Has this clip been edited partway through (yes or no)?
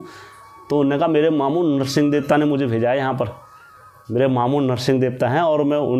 no